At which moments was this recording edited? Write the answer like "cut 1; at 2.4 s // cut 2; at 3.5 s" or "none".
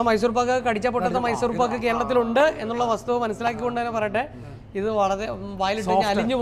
none